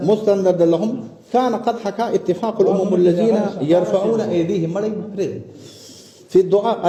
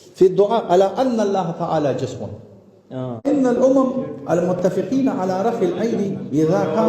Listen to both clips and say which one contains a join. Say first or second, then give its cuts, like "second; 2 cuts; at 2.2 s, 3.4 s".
second; 1 cut; at 3.3 s